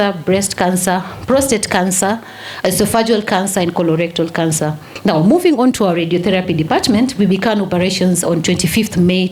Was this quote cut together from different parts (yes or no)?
yes